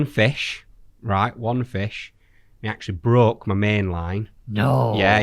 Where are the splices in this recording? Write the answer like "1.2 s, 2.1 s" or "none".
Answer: none